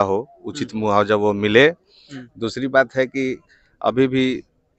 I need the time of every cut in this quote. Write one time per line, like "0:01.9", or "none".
none